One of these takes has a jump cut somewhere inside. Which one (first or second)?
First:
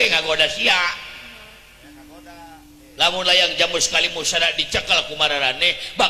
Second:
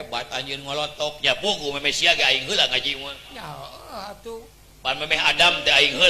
second